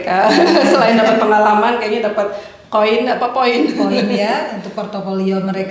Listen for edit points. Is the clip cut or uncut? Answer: uncut